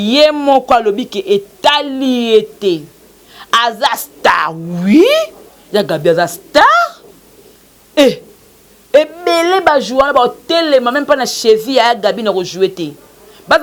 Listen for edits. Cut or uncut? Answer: uncut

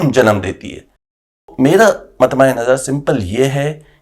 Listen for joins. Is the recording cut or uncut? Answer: cut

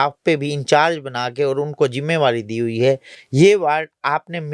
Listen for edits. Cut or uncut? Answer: uncut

